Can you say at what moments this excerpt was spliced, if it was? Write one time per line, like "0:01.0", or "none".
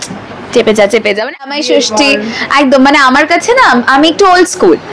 0:01.5